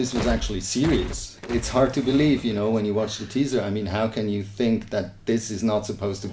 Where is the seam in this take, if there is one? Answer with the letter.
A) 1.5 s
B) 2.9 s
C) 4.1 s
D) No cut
A